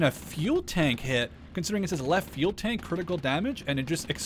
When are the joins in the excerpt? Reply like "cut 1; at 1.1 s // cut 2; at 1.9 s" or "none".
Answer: none

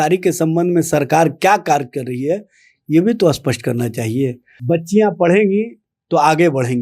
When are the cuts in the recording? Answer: cut 1; at 4.5 s

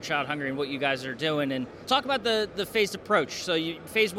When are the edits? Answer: cut 1; at 1.8 s

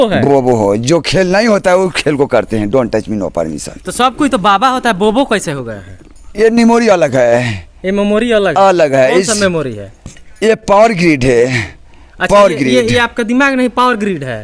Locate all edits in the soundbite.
none

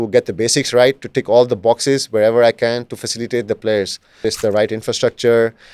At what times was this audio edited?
cut 1; at 4.2 s

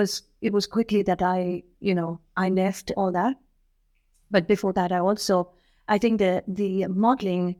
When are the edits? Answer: none

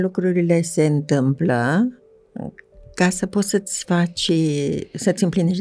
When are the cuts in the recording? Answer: none

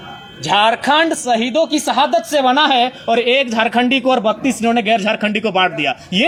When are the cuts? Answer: none

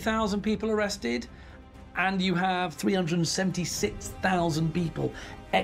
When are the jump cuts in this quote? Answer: cut 1; at 2.7 s

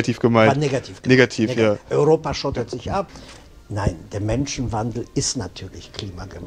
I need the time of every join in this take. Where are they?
cut 1; at 3.1 s

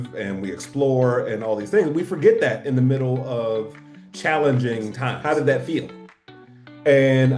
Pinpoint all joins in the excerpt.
cut 1; at 5.1 s

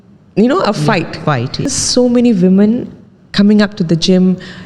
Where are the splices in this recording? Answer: cut 1; at 1.7 s

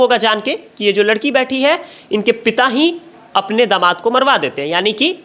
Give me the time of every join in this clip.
none

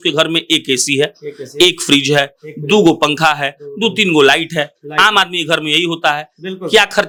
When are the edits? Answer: none

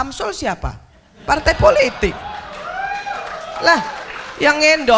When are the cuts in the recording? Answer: none

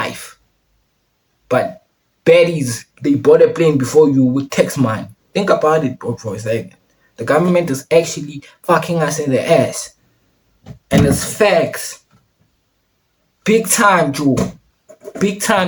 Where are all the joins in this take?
none

